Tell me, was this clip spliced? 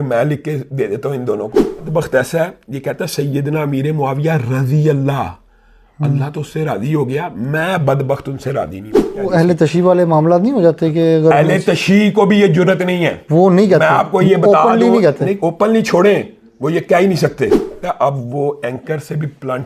yes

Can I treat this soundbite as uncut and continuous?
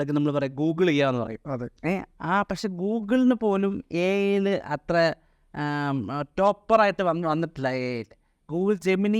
yes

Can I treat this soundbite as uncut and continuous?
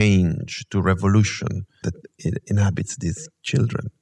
no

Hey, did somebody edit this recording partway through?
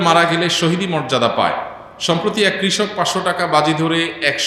no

